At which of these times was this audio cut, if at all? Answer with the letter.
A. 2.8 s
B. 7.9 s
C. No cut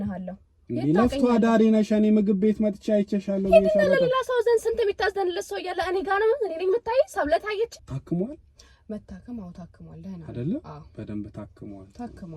B